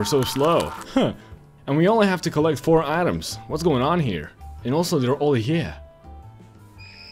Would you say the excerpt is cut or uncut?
uncut